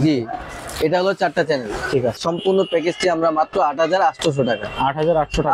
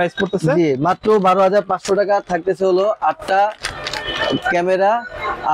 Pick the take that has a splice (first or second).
first